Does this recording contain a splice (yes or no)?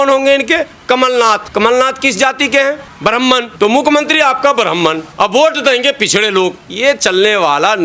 yes